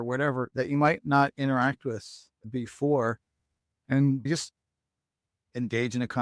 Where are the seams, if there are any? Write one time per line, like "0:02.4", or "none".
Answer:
0:04.3